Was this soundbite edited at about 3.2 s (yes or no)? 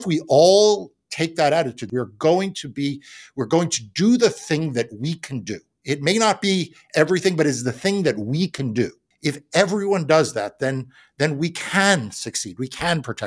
no